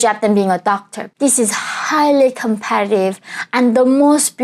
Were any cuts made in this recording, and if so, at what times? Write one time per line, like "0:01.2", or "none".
0:01.0